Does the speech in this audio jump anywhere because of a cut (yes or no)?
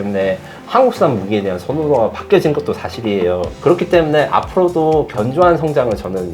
yes